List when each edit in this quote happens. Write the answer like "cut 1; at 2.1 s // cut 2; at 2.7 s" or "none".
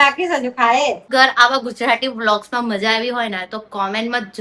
cut 1; at 1.1 s